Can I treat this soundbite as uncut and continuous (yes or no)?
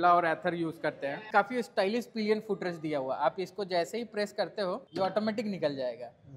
no